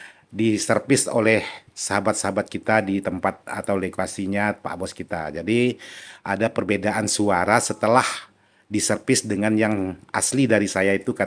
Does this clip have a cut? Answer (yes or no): no